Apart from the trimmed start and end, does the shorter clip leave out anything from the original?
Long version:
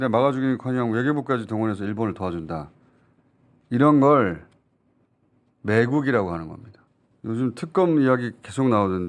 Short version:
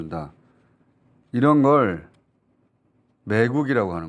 no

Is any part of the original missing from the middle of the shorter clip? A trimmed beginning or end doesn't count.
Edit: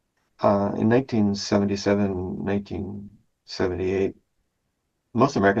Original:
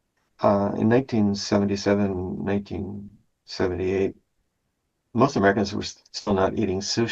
no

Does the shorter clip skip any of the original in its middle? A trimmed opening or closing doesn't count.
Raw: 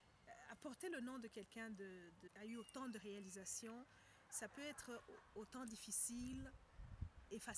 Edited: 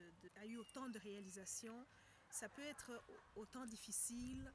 no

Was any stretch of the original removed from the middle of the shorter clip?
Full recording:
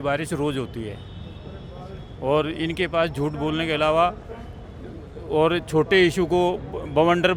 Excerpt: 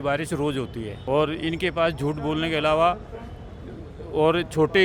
yes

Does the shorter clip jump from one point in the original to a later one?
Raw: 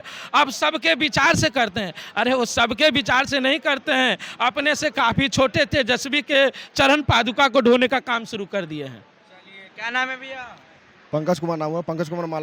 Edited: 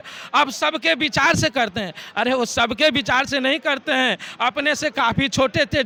no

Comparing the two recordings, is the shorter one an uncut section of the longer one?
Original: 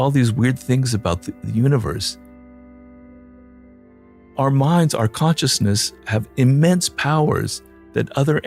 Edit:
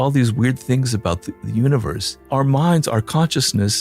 no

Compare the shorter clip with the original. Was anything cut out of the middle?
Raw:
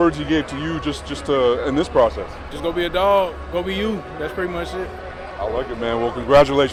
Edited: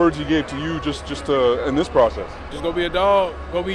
no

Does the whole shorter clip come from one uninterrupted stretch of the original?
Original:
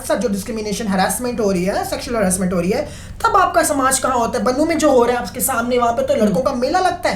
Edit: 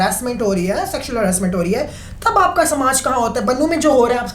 yes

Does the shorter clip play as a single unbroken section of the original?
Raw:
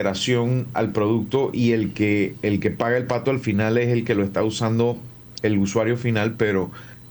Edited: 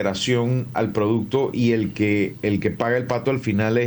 yes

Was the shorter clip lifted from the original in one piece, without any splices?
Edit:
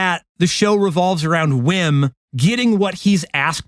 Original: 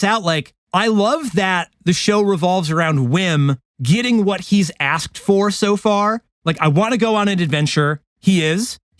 yes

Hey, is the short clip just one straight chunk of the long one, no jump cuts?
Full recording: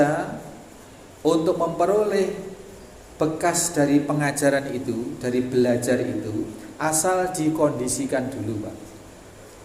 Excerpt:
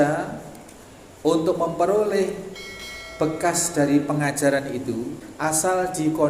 no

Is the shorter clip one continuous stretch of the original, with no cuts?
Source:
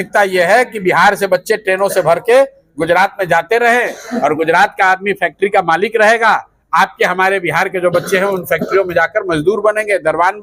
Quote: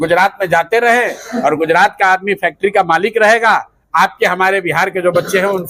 yes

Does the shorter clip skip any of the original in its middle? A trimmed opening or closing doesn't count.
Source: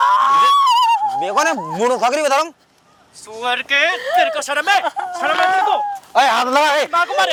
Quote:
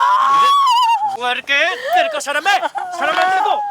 yes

